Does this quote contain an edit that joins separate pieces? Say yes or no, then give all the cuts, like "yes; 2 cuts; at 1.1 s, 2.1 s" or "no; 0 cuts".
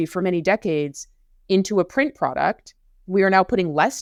no; 0 cuts